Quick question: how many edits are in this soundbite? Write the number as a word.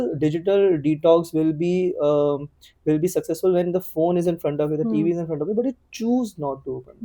zero